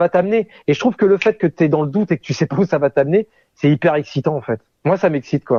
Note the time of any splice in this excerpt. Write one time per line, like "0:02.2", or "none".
none